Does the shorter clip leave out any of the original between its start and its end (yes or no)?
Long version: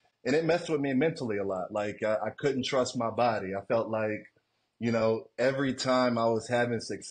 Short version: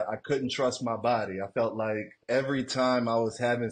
yes